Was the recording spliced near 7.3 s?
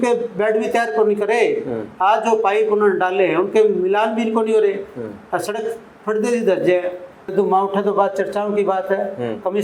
yes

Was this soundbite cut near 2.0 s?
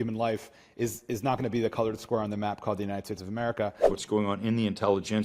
no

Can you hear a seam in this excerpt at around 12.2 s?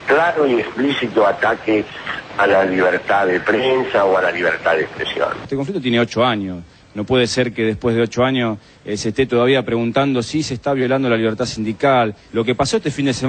yes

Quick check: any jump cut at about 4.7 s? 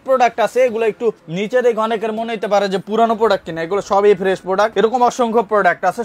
yes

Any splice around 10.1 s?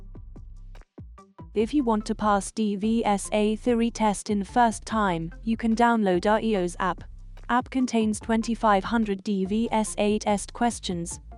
no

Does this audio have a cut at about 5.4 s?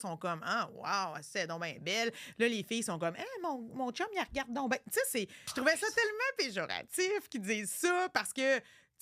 yes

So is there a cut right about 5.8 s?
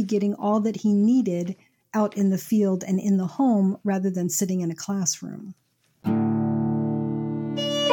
yes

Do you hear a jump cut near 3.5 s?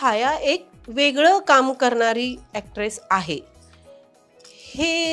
no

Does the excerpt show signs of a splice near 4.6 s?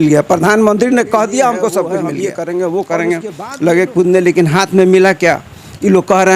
no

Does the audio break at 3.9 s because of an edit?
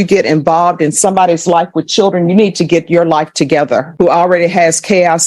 yes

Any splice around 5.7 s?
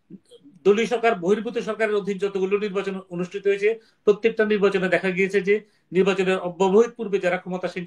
no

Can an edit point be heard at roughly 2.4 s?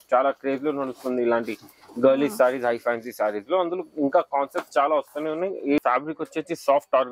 no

